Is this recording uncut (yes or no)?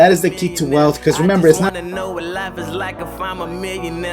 no